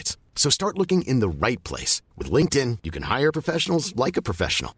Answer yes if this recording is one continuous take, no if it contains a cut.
yes